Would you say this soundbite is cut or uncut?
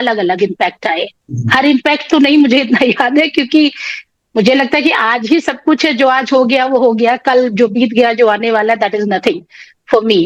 uncut